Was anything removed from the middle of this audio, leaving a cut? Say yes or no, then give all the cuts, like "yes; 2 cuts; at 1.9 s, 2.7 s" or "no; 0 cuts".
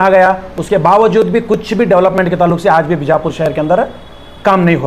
no; 0 cuts